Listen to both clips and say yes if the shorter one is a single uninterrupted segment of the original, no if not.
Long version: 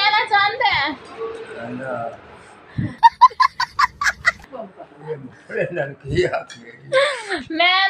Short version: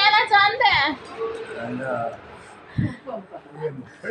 no